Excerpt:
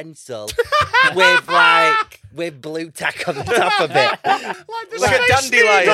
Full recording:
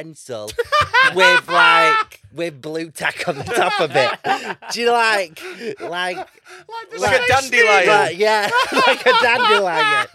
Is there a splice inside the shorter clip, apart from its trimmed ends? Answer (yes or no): yes